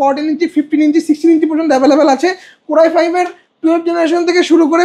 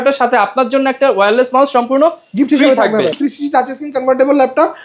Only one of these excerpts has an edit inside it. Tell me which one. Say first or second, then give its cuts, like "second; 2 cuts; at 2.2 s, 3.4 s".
second; 1 cut; at 3.2 s